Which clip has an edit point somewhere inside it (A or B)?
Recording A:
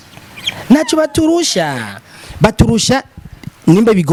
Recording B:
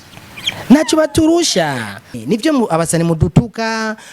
B